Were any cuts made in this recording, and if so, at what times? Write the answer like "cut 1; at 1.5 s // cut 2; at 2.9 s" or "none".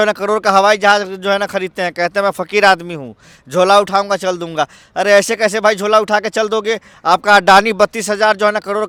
none